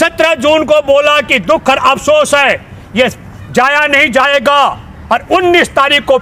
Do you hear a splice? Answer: no; 0 cuts

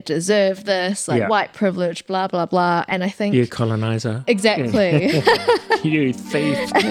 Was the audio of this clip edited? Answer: no; 0 cuts

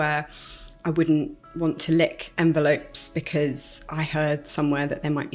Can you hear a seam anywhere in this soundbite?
no; 0 cuts

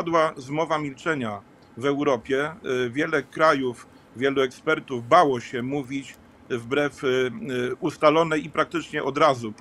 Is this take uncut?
yes; 0 cuts

